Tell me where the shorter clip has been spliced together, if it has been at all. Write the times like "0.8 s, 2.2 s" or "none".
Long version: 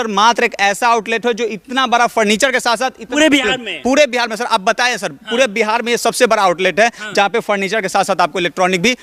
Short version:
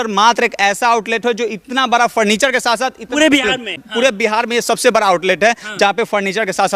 3.7 s